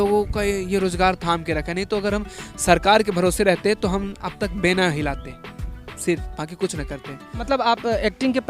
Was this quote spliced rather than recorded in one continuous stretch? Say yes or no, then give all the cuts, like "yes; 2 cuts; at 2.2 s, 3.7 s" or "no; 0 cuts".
yes; 1 cut; at 7.4 s